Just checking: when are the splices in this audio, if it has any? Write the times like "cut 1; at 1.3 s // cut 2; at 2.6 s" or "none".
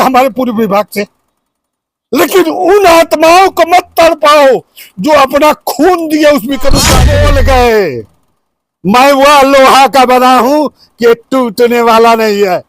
cut 1; at 6.9 s